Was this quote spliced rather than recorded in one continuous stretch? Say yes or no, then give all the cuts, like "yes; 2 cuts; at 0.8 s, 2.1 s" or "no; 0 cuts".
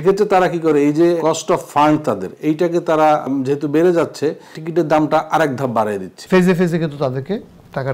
yes; 4 cuts; at 1.2 s, 3.2 s, 4.6 s, 6.1 s